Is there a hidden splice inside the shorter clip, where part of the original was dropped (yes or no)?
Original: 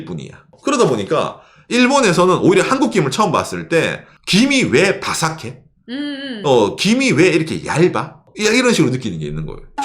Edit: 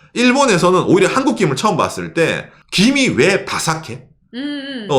no